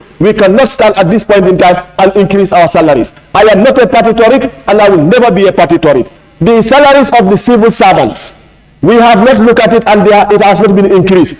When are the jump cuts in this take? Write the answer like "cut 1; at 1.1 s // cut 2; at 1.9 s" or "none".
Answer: cut 1; at 6.2 s